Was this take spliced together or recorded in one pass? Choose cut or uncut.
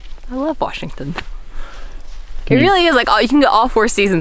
uncut